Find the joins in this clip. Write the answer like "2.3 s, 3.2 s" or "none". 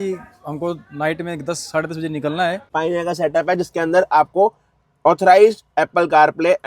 2.6 s